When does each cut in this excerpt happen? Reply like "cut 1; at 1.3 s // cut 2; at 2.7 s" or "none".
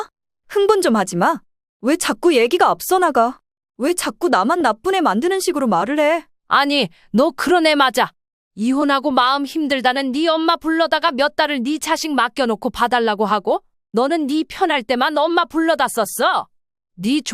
cut 1; at 6.3 s